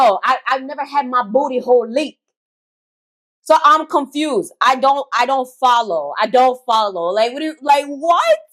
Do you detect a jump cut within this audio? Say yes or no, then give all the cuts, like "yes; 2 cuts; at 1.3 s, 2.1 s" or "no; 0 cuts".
no; 0 cuts